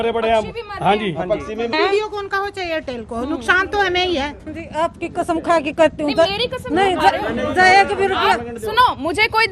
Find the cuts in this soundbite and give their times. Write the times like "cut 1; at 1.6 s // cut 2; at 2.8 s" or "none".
cut 1; at 1.7 s // cut 2; at 4.5 s